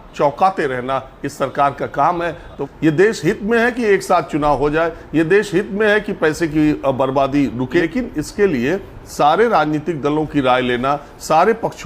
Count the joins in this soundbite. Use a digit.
2